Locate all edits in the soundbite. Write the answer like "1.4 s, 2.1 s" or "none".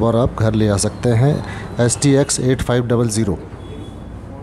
none